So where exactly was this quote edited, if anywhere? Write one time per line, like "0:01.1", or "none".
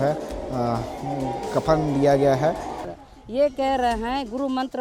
0:02.8